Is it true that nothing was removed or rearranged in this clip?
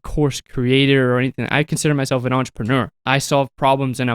no; 1 cut; at 3.0 s

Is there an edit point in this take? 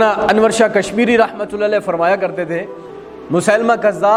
no; 0 cuts

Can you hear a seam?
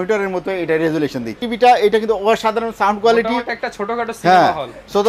yes; 1 cut; at 1.5 s

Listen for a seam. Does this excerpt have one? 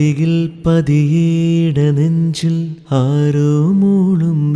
no; 0 cuts

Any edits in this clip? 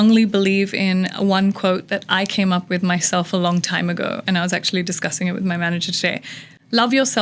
no; 0 cuts

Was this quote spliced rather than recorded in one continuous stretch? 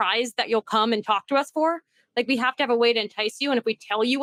no; 0 cuts

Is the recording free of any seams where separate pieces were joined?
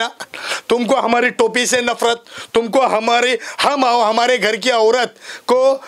yes; 0 cuts

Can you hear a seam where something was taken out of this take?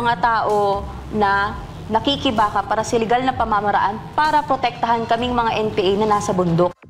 no; 0 cuts

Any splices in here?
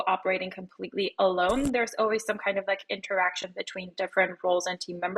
no; 0 cuts

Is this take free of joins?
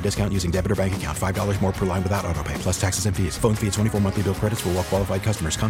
yes; 0 cuts

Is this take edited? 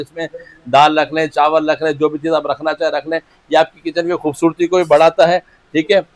no; 0 cuts

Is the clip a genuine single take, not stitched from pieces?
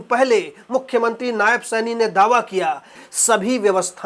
no; 1 cut; at 3.0 s

